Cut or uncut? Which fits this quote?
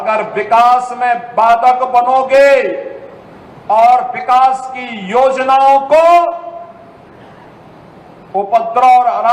uncut